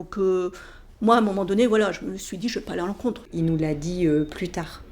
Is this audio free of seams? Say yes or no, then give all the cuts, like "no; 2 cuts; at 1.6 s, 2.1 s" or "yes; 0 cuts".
no; 1 cut; at 3.3 s